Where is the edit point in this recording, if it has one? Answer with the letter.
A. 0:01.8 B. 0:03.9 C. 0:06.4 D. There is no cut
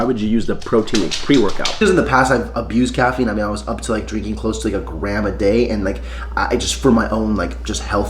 A